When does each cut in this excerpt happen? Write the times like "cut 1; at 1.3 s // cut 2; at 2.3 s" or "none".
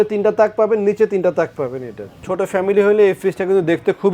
cut 1; at 2.2 s